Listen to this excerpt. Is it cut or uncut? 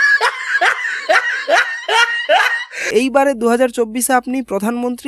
cut